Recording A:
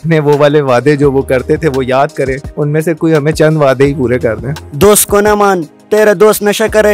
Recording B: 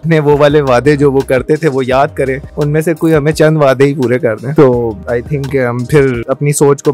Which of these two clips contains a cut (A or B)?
A